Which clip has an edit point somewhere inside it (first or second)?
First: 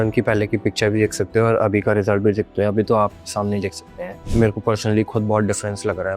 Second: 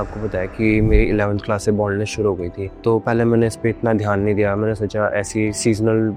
first